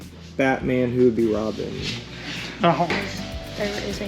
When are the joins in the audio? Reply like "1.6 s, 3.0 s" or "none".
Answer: 2.9 s